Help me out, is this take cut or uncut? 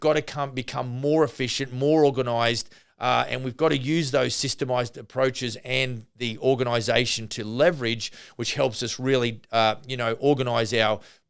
uncut